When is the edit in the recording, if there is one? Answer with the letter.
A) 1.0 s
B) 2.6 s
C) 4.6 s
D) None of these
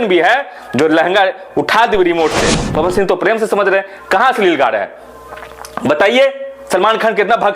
B